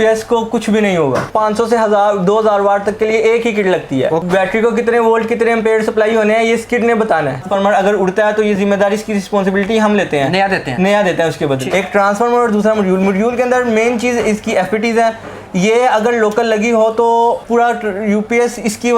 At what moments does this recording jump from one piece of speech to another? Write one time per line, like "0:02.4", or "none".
0:01.3
0:04.2
0:07.5
0:11.5
0:17.4